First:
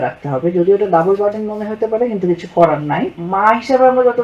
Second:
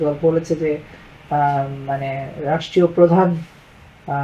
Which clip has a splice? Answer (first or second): first